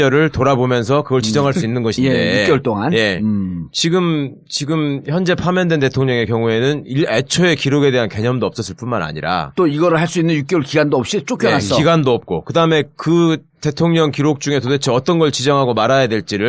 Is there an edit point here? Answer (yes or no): yes